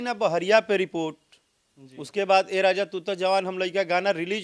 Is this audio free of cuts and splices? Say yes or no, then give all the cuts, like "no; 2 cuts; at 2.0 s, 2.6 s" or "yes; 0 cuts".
yes; 0 cuts